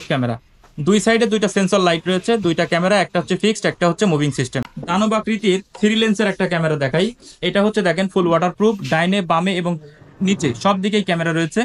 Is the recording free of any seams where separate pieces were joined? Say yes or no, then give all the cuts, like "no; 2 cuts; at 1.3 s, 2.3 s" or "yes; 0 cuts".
no; 1 cut; at 4.7 s